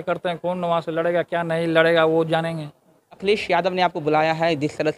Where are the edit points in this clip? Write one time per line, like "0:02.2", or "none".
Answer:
0:03.2